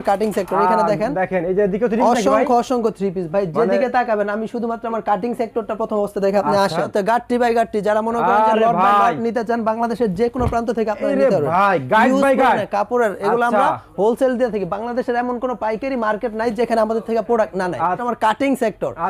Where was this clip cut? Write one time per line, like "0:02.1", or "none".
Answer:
0:06.9
0:18.0

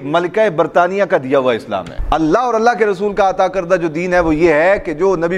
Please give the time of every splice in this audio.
0:01.9

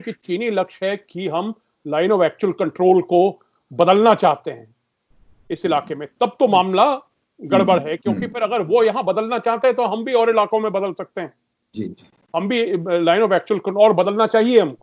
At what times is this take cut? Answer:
none

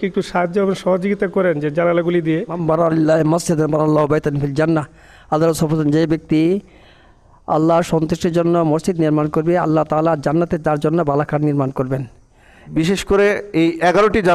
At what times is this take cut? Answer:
0:02.5
0:12.6

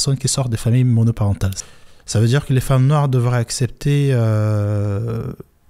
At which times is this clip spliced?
0:01.5

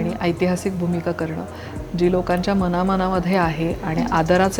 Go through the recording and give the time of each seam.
none

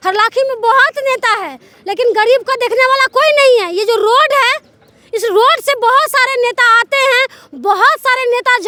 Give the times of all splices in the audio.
none

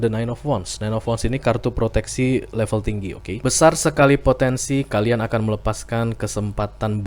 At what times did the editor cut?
0:03.4

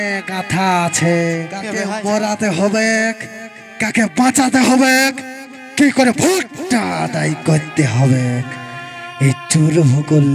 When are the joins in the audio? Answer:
0:01.7

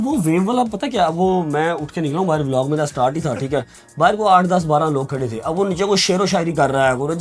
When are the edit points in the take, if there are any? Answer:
none

